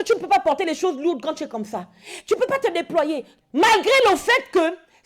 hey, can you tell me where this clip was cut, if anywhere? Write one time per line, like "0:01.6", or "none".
0:03.3